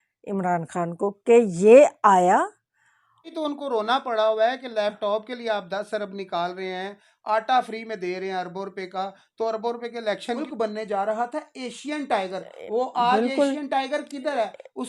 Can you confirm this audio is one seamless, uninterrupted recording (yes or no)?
no